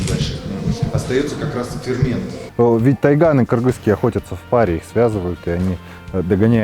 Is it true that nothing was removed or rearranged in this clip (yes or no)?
no